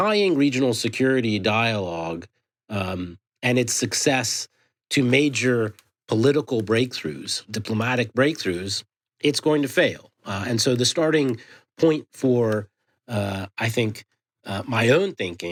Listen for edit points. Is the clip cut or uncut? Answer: uncut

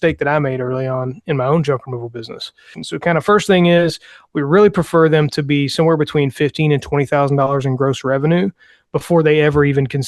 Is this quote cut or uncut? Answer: cut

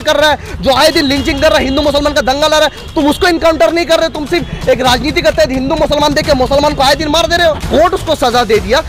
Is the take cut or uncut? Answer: cut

